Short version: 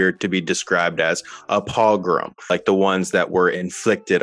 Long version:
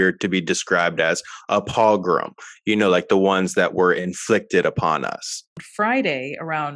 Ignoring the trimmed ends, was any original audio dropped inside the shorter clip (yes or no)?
yes